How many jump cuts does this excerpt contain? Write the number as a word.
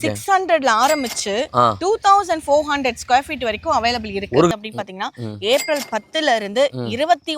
one